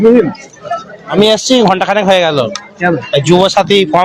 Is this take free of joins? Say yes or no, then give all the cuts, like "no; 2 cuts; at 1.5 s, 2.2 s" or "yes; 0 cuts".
no; 1 cut; at 1.1 s